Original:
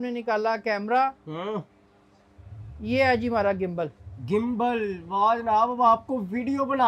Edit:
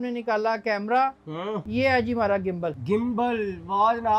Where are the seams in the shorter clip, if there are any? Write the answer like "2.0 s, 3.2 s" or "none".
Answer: 1.6 s, 2.8 s